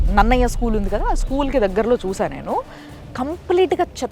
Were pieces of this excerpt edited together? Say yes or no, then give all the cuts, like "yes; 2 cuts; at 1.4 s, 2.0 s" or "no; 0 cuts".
no; 0 cuts